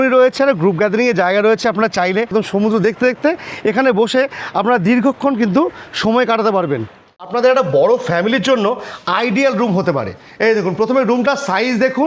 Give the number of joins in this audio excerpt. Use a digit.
2